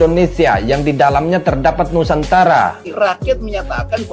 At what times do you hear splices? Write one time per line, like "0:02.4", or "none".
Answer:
0:02.8